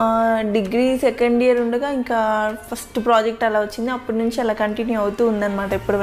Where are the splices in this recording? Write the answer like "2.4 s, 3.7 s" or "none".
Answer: none